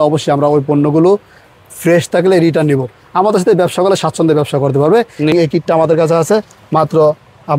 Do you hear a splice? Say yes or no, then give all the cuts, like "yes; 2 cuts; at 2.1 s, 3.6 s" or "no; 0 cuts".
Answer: yes; 1 cut; at 5.3 s